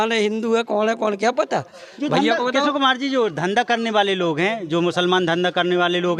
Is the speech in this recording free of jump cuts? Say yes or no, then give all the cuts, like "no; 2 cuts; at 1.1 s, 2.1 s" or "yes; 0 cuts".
yes; 0 cuts